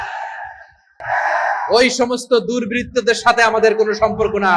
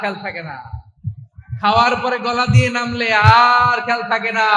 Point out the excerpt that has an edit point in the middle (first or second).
first